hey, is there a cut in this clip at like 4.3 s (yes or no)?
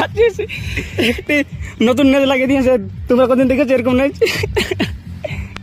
yes